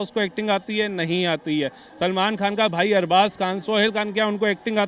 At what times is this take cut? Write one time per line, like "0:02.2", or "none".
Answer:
none